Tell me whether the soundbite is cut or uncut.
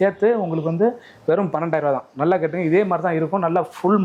uncut